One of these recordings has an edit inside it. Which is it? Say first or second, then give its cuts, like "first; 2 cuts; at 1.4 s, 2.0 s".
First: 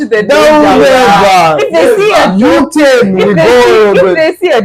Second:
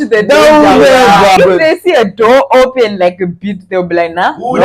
second; 1 cut; at 1.4 s